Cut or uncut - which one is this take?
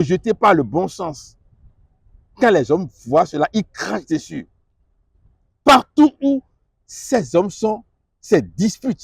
uncut